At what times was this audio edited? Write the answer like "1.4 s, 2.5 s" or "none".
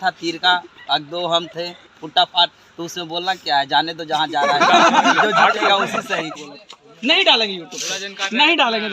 6.3 s